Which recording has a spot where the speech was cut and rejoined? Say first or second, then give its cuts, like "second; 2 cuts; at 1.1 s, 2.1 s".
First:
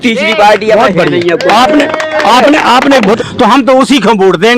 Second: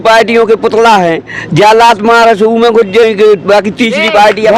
first; 1 cut; at 3.2 s